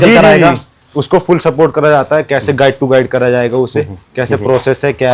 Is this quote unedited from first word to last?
yes; 0 cuts

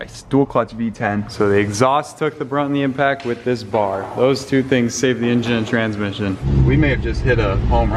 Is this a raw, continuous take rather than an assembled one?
no; 2 cuts; at 1.2 s, 6.4 s

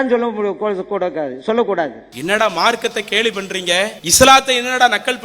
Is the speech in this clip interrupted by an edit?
yes; 2 cuts; at 2.1 s, 4.0 s

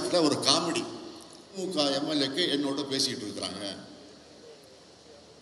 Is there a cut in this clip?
yes; 1 cut; at 1.6 s

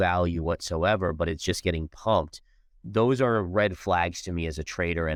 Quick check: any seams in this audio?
no; 0 cuts

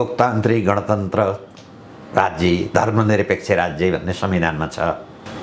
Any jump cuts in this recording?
no; 0 cuts

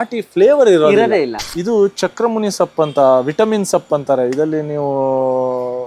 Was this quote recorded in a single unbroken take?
no; 1 cut; at 1.4 s

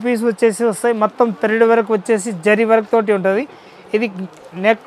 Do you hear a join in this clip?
no; 0 cuts

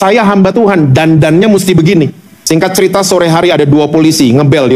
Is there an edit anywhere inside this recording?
yes; 1 cut; at 2.3 s

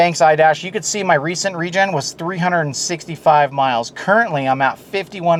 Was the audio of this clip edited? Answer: no; 0 cuts

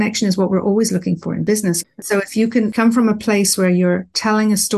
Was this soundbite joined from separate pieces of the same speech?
yes; 1 cut; at 1.5 s

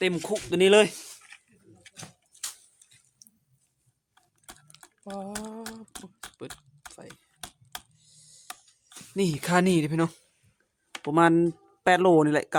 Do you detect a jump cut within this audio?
no; 0 cuts

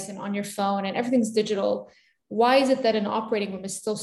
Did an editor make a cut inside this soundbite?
no; 0 cuts

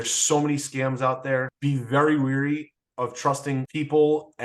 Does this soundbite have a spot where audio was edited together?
yes; 2 cuts; at 1.5 s, 3.7 s

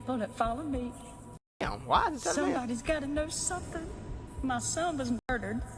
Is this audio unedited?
no; 1 cut; at 3.9 s

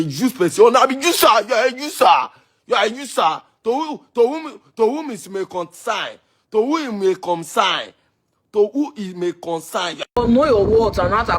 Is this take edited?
yes; 1 cut; at 10.2 s

